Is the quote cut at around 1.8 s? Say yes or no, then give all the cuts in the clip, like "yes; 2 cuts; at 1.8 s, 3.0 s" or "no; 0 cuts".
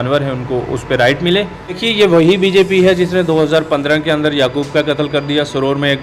yes; 1 cut; at 1.8 s